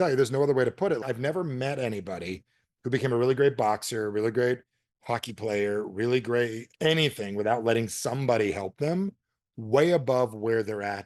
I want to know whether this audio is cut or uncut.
cut